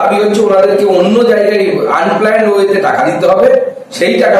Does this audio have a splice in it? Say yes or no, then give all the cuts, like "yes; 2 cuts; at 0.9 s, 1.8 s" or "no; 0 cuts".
no; 0 cuts